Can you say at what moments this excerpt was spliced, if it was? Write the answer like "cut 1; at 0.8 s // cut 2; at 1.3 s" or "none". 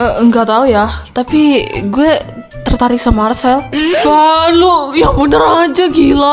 none